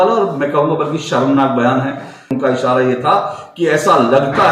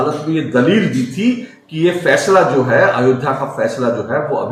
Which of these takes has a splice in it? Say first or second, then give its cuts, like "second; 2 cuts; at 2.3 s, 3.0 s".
first; 1 cut; at 2.3 s